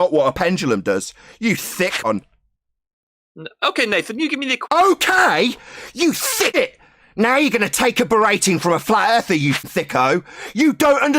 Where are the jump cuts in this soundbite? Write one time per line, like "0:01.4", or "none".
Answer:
0:02.0
0:06.5
0:09.7